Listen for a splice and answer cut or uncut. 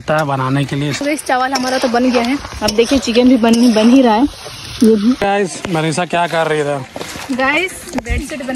cut